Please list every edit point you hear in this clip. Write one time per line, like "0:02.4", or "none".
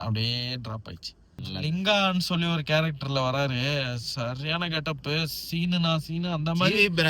0:01.4